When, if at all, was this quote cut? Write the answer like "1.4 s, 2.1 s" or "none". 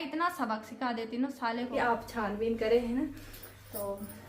1.7 s

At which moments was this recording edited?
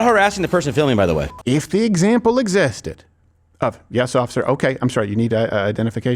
1.3 s

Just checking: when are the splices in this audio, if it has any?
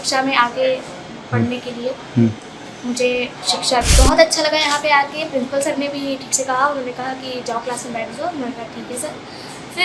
3.9 s

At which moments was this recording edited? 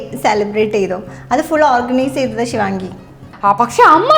3.2 s

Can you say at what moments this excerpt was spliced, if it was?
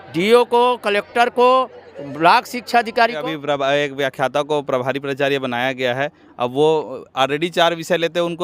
3.2 s

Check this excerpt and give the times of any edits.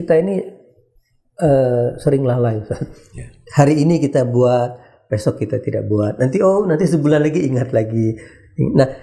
none

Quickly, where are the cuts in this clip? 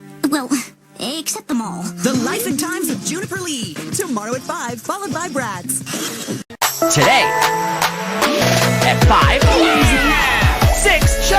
6.5 s

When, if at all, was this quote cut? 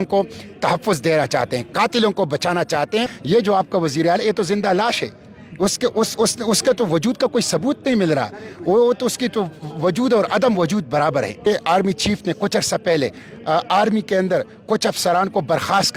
3.2 s, 11.4 s

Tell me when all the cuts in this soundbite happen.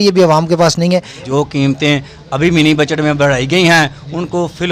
1.2 s

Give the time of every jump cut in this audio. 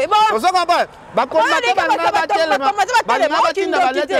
none

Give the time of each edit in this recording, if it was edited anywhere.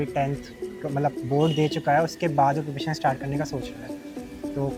none

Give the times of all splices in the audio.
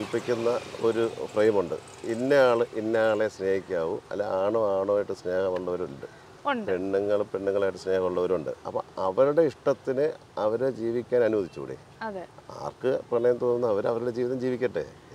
4.1 s, 8.6 s

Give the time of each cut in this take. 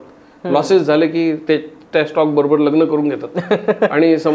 none

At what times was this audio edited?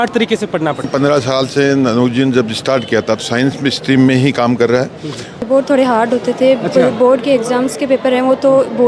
0.8 s, 5.4 s

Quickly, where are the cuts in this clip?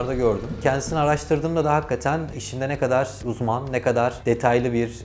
none

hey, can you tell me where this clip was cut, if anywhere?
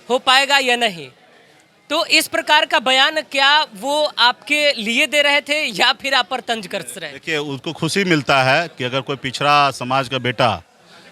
none

